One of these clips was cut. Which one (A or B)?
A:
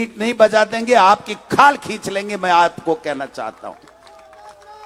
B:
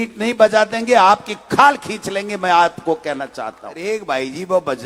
B